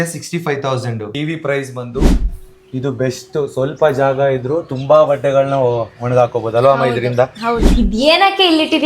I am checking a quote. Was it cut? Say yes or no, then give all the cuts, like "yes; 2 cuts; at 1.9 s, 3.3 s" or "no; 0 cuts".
yes; 3 cuts; at 1.1 s, 2.2 s, 7.7 s